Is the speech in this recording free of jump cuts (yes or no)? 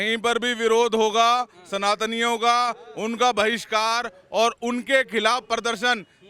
yes